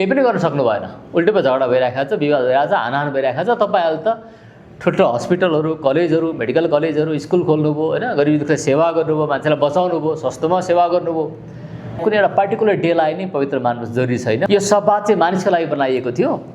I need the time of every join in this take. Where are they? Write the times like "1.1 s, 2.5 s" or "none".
12.0 s, 14.5 s